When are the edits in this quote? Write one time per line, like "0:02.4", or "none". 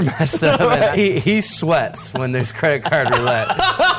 0:00.9